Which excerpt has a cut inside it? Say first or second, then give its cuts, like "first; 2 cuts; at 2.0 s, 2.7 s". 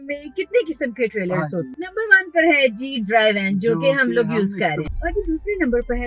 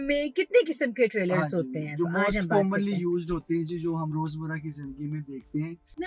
first; 2 cuts; at 1.7 s, 4.9 s